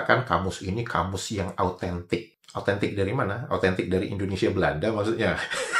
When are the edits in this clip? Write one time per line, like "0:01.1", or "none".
none